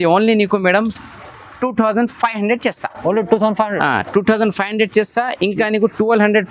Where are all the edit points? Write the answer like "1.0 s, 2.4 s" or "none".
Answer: none